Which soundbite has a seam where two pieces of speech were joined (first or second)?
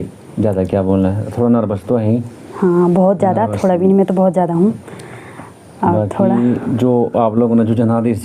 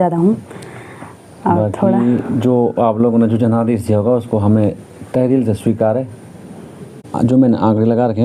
second